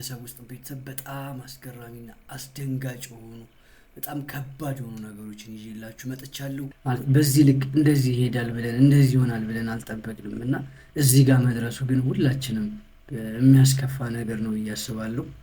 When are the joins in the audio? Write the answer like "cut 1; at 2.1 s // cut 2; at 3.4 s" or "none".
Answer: cut 1; at 6.7 s